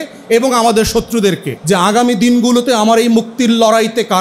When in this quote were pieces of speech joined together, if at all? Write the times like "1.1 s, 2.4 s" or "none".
1.5 s